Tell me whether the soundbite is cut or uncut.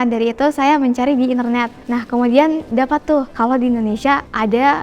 cut